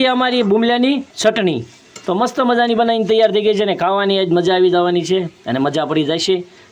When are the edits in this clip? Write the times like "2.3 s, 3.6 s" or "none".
1.1 s